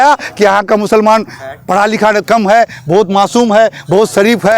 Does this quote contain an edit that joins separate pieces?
no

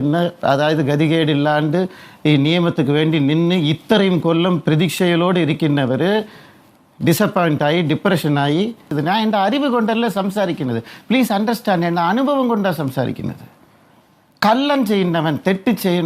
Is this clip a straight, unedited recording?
no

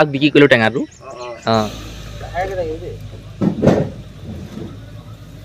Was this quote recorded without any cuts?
no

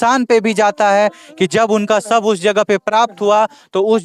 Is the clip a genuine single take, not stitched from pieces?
yes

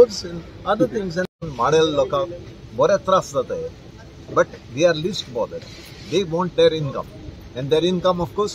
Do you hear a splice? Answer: yes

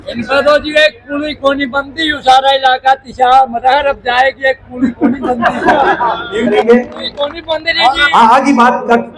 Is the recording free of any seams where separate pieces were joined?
no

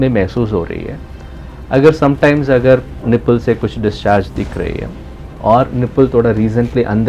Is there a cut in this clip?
no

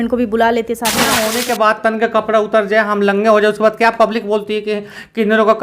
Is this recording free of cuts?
no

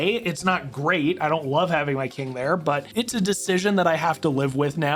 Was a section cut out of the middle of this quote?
no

